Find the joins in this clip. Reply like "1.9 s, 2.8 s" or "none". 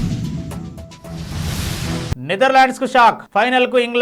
2.1 s